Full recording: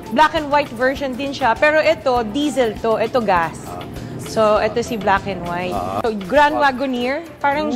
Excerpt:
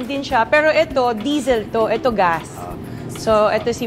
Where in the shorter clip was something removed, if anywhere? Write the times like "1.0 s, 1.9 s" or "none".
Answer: none